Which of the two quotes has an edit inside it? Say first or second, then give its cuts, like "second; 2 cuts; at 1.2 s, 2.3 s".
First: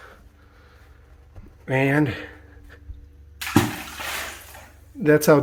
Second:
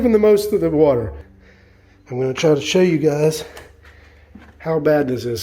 second; 1 cut; at 1.2 s